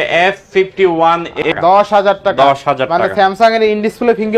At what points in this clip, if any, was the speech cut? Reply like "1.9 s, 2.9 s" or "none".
1.4 s